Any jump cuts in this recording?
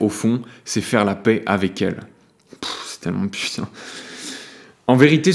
no; 0 cuts

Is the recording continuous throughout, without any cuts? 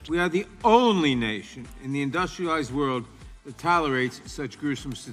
yes; 0 cuts

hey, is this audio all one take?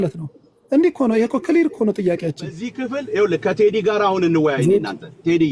no; 1 cut; at 2.8 s

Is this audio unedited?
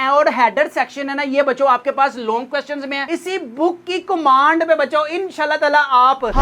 no; 1 cut; at 3.0 s

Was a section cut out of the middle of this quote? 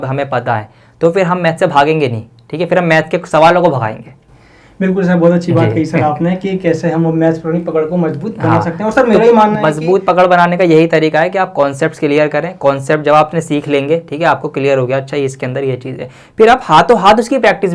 no; 0 cuts

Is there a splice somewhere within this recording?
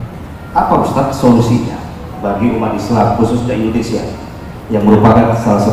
no; 0 cuts

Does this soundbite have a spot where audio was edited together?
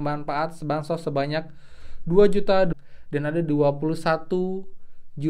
yes; 1 cut; at 2.7 s

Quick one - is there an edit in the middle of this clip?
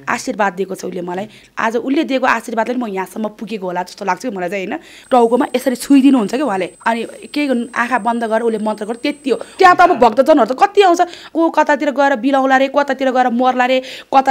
yes; 4 cuts; at 4.9 s, 6.8 s, 9.5 s, 11.3 s

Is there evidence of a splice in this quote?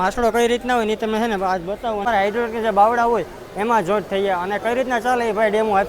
yes; 1 cut; at 2.0 s

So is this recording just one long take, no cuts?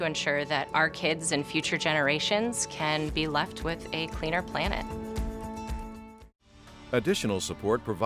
no; 1 cut; at 6.7 s

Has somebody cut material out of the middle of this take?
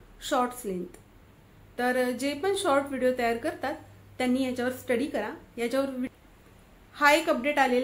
yes; 1 cut; at 6.1 s

